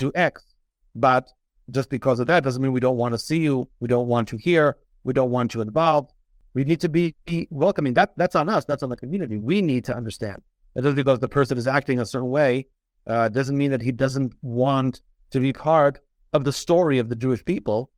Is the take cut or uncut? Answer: uncut